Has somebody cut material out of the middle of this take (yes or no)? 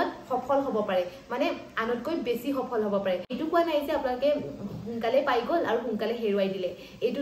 yes